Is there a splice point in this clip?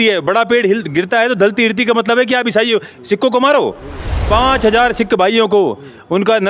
no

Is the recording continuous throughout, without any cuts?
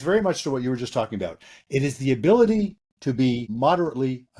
no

